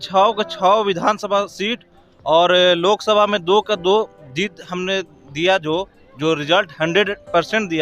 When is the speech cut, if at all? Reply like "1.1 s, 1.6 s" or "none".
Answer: none